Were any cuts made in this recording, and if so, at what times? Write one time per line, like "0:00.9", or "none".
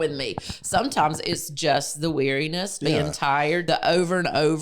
0:02.7
0:03.6